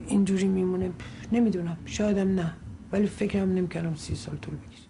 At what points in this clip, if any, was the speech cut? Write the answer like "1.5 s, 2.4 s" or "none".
3.1 s